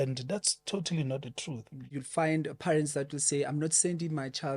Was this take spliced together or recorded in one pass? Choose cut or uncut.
cut